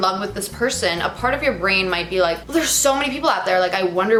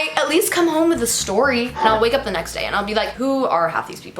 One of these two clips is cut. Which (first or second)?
second